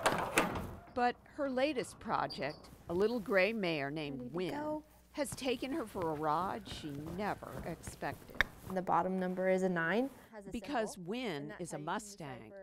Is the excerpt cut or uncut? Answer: uncut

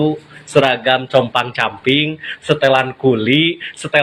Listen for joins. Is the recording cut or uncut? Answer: uncut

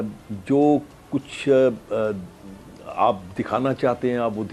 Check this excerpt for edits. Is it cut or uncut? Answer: uncut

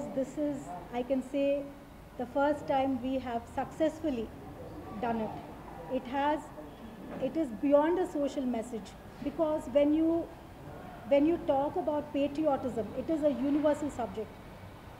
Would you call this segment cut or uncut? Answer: uncut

